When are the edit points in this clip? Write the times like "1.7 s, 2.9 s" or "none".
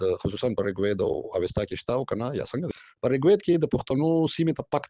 2.7 s

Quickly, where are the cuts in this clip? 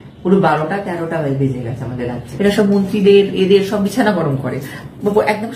2.3 s

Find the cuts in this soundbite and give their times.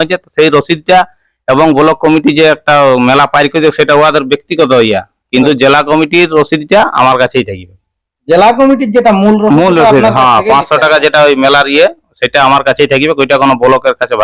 none

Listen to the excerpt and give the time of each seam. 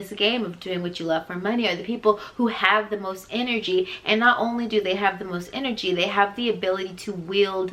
none

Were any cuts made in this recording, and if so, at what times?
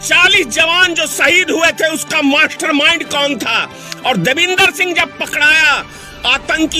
none

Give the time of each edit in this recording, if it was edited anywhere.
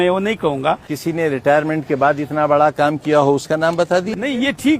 0.9 s

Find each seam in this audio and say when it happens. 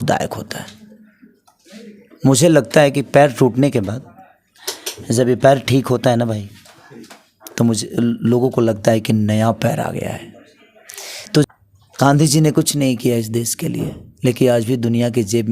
11.5 s

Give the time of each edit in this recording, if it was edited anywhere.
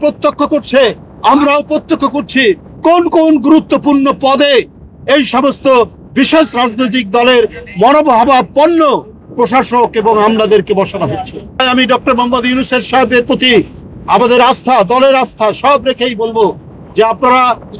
11.6 s

